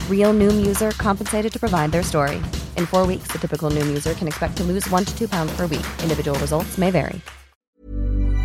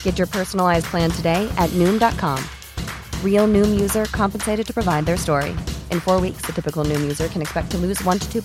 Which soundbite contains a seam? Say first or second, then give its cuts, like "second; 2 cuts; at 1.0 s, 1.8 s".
first; 1 cut; at 7.5 s